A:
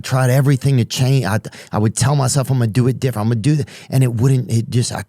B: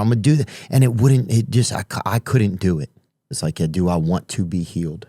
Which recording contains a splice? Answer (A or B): B